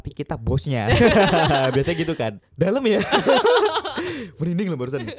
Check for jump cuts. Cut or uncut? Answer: cut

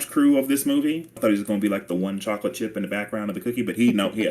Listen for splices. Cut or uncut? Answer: cut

